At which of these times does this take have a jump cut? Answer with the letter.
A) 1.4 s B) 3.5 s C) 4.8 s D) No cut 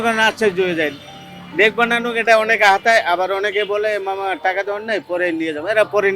D